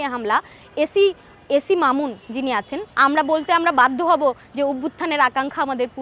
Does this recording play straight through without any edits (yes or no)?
no